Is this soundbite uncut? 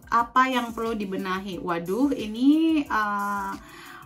yes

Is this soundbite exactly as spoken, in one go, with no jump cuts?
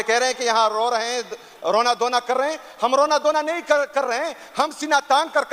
yes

